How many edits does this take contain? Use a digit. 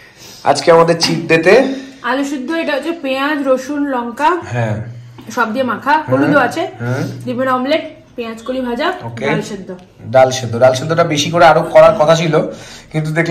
0